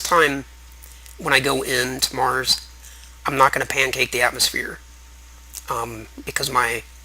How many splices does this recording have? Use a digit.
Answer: 1